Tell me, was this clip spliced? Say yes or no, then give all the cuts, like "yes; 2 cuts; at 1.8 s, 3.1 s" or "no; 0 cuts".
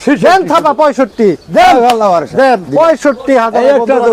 no; 0 cuts